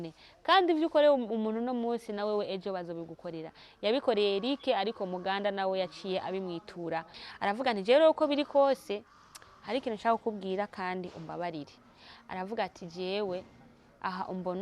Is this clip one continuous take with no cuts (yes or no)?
no